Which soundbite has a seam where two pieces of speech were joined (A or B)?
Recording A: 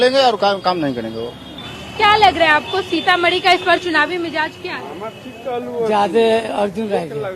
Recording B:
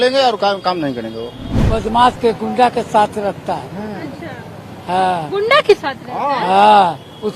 B